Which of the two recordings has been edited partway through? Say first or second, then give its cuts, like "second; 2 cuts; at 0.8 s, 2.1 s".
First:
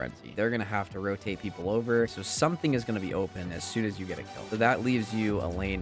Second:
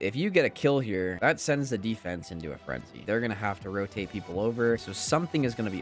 second; 1 cut; at 1.1 s